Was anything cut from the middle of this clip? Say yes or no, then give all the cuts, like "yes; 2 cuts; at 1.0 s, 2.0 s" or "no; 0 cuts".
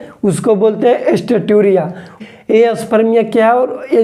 yes; 1 cut; at 2.2 s